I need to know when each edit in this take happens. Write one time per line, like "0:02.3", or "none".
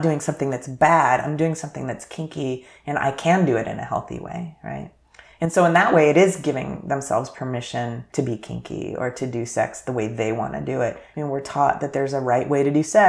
0:08.1
0:11.0